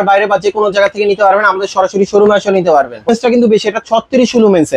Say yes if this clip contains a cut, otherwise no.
yes